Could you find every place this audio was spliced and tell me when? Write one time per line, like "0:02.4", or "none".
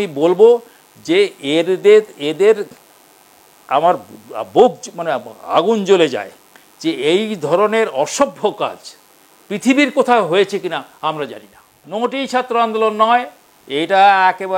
0:11.8